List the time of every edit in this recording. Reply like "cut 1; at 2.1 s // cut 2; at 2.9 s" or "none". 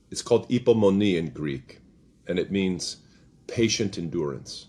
none